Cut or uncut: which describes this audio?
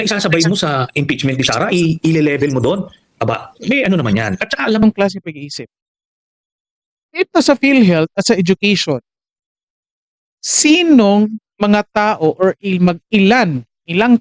cut